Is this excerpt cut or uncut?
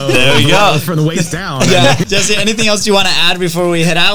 cut